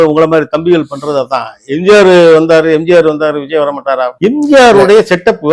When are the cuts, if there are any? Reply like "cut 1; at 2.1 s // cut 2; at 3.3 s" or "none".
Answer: cut 1; at 4.1 s